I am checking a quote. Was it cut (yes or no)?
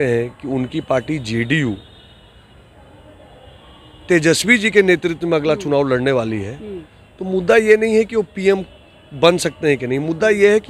no